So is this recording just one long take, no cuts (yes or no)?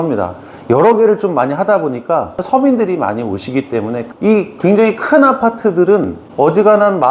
no